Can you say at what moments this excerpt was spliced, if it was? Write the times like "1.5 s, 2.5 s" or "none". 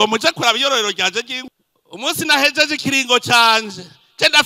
1.4 s